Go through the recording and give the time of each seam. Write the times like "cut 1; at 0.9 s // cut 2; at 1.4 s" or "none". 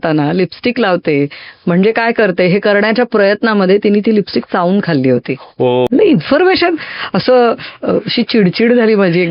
cut 1; at 5.9 s